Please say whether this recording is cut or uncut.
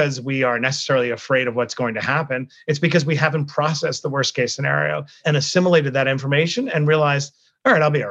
cut